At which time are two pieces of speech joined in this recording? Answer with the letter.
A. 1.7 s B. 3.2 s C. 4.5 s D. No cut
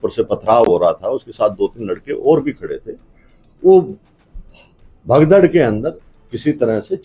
D